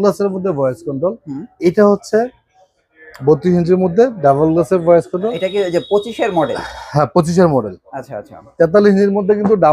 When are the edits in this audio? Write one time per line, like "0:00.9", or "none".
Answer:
0:05.3